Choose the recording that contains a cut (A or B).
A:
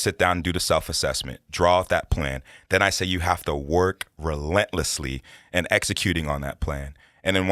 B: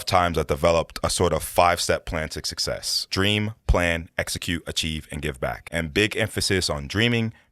B